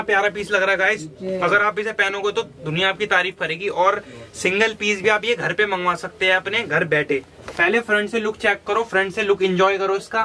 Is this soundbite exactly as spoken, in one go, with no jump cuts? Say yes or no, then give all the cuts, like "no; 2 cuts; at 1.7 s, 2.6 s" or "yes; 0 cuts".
no; 1 cut; at 7.4 s